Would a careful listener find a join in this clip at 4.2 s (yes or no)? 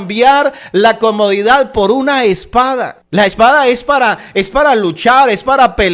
no